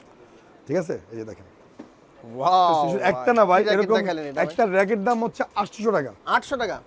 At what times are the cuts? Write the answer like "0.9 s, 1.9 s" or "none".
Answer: none